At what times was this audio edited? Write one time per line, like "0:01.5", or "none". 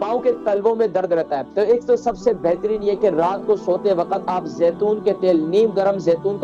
0:01.4